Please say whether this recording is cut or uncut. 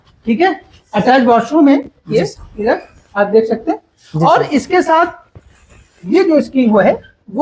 uncut